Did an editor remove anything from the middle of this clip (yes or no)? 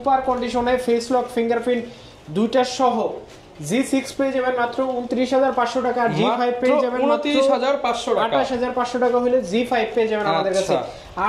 no